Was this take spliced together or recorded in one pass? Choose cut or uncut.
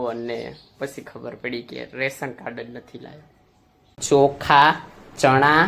cut